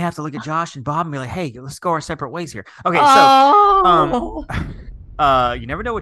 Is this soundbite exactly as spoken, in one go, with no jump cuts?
no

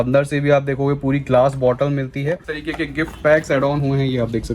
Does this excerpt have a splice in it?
yes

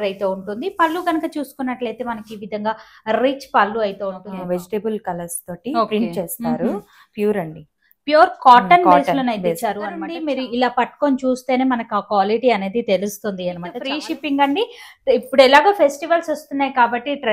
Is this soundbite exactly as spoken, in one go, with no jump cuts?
no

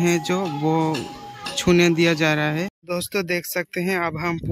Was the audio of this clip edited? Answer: yes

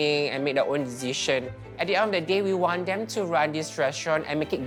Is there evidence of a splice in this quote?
no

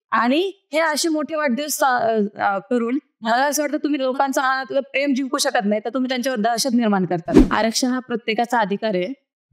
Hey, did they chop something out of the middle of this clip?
yes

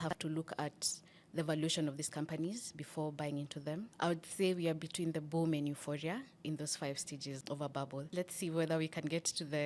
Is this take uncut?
no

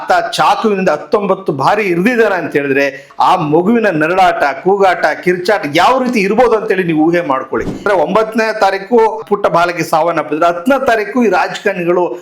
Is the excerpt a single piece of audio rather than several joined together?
no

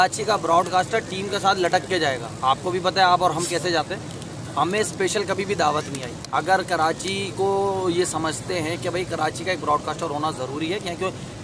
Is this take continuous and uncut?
yes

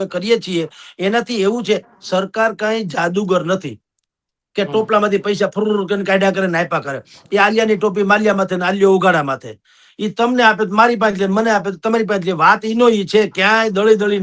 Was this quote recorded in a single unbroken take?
yes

